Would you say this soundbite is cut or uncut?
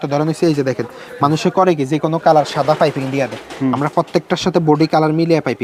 uncut